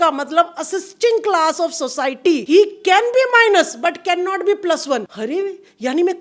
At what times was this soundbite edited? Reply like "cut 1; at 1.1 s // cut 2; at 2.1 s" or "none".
cut 1; at 2.4 s // cut 2; at 5.1 s